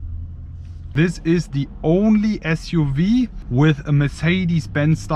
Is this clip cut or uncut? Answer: cut